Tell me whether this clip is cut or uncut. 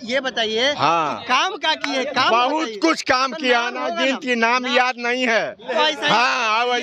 uncut